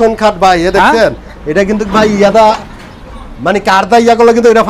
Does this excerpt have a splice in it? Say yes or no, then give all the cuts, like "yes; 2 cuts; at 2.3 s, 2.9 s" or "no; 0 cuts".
no; 0 cuts